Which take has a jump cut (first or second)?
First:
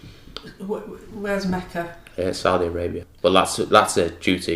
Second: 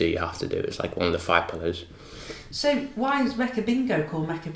first